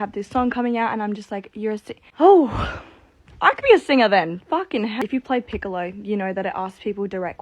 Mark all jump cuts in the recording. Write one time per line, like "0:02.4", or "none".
0:04.9